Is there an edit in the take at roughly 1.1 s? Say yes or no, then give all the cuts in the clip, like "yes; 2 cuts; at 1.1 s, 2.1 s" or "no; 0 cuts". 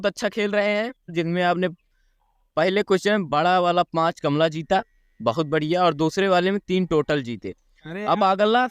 yes; 1 cut; at 1.1 s